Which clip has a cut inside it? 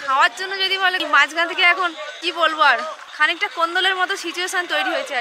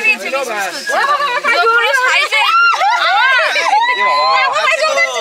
first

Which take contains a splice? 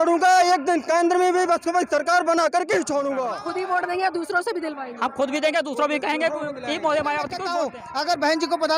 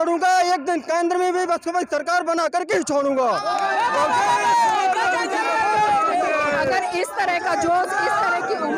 first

